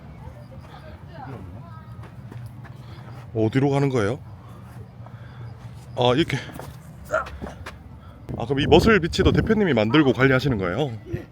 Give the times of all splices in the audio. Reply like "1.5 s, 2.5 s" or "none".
8.2 s

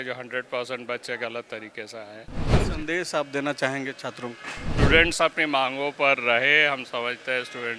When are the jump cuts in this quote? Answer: 2.5 s, 4.6 s

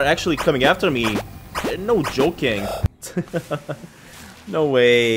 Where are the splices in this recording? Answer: 3.0 s

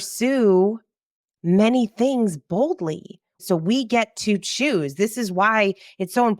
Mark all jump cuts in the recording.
3.4 s

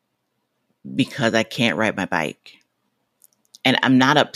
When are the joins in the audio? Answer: none

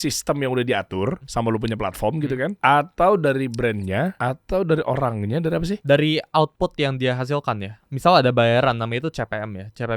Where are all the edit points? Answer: 1.2 s, 2.5 s, 4.2 s, 5.8 s, 7.7 s

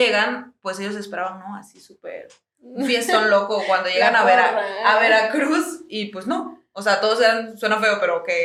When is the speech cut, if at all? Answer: none

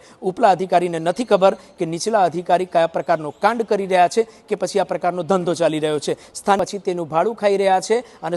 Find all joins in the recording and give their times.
6.6 s

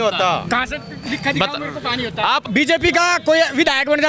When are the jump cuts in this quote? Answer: 2.5 s

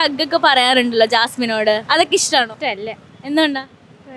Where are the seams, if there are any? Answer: 1.8 s, 2.5 s

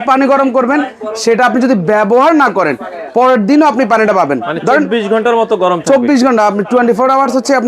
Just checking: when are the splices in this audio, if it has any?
none

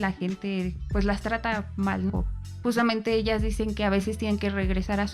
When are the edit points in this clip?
2.1 s

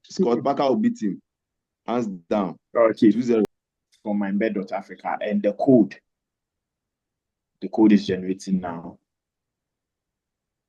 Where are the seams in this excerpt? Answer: 3.6 s

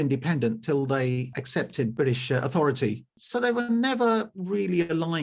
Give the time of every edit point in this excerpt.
1.8 s, 3.2 s

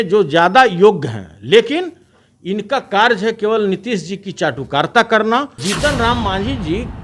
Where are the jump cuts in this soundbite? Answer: 5.7 s

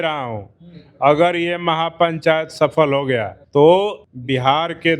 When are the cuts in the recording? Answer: 3.4 s, 4.1 s

